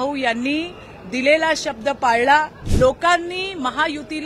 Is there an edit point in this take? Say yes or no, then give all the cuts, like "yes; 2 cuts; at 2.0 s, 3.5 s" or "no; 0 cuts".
yes; 1 cut; at 2.6 s